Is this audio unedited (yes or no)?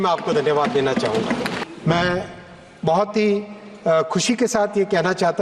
no